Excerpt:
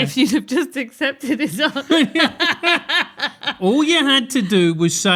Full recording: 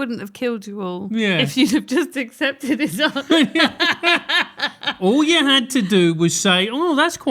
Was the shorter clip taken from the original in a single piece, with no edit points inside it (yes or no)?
yes